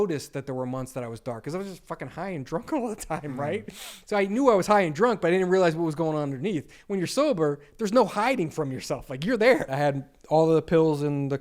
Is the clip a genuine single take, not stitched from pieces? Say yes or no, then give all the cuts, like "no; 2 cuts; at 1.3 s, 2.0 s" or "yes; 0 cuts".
no; 1 cut; at 9.7 s